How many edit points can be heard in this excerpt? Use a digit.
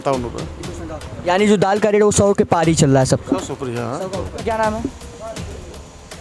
1